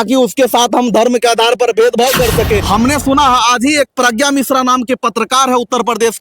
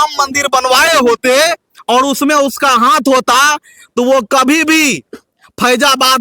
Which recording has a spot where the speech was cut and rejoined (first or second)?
first